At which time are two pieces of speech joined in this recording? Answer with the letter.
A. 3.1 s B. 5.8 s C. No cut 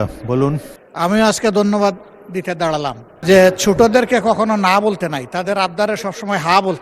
A